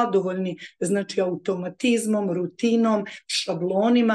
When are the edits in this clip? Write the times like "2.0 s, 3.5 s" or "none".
none